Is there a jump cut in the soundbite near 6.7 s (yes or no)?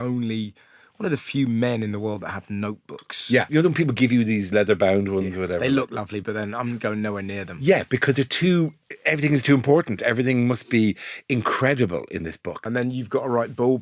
no